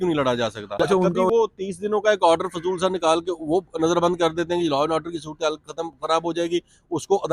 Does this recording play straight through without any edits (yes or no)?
no